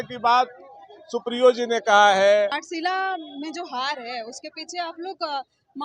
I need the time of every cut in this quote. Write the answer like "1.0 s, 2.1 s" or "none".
2.6 s